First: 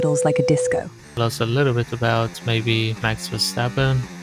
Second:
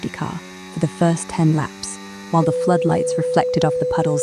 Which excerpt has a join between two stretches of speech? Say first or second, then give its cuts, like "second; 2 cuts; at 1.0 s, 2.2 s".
first; 1 cut; at 1.2 s